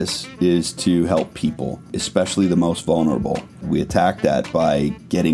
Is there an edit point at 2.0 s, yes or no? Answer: yes